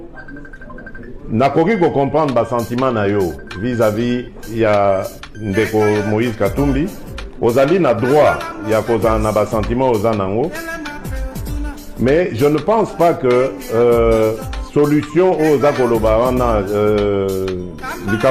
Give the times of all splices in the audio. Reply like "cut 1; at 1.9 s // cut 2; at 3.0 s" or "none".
cut 1; at 10.5 s // cut 2; at 11.8 s